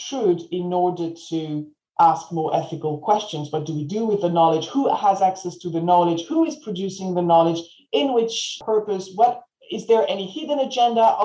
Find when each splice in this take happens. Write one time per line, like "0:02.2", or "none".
0:08.6